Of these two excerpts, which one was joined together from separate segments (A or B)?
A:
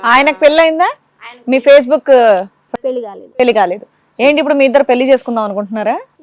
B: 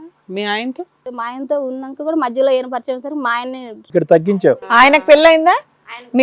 B